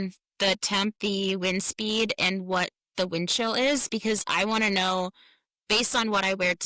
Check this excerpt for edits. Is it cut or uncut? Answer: cut